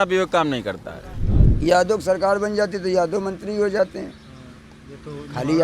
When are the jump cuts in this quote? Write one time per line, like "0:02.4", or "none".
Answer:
0:01.3